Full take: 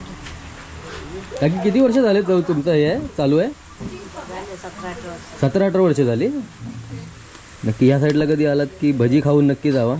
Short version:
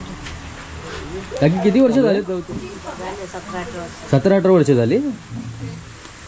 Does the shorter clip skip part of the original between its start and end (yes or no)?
yes